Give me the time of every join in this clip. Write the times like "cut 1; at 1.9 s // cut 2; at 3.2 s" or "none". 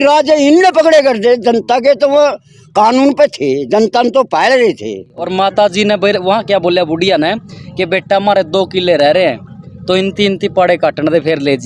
cut 1; at 5.2 s